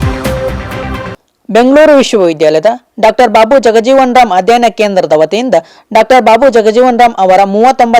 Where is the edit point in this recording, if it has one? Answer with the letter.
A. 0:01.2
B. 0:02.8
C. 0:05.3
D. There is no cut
A